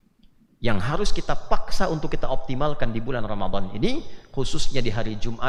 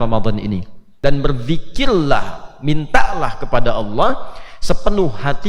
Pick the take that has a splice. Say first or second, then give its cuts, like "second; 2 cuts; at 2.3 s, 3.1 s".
second; 1 cut; at 1.0 s